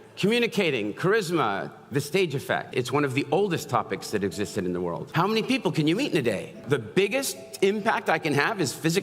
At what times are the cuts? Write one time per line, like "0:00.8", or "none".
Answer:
0:02.7
0:05.0
0:06.6